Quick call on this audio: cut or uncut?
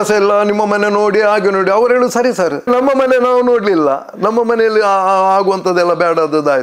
uncut